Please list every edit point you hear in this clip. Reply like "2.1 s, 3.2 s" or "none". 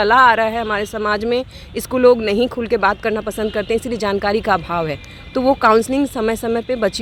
none